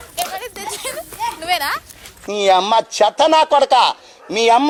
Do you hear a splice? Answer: no; 0 cuts

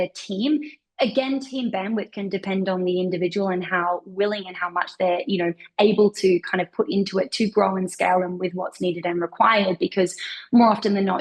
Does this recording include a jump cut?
no; 0 cuts

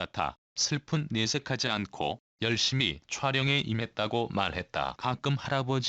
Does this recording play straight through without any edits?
no; 1 cut; at 5.0 s

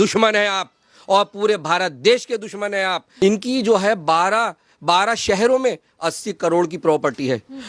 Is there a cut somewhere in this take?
yes; 1 cut; at 3.0 s

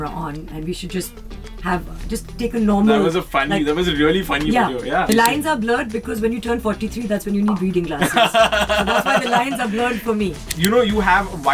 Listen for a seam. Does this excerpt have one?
yes; 2 cuts; at 5.1 s, 10.5 s

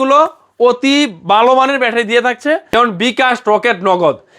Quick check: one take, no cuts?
no; 1 cut; at 2.7 s

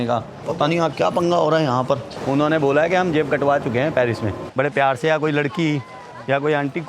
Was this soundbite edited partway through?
yes; 2 cuts; at 2.1 s, 4.4 s

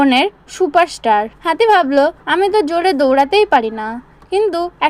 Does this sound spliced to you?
yes; 2 cuts; at 1.3 s, 2.2 s

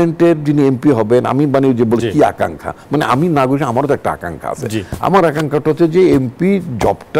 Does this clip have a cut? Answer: no; 0 cuts

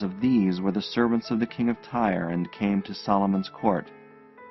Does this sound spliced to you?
yes; 1 cut; at 3.2 s

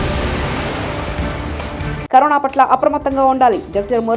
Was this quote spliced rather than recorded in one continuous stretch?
yes; 1 cut; at 2.0 s

